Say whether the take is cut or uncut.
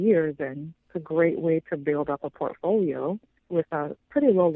cut